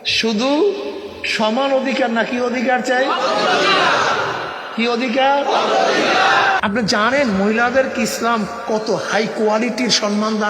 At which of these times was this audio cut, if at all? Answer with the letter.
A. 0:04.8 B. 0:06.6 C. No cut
B